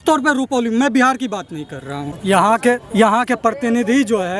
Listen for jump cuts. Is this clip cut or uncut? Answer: cut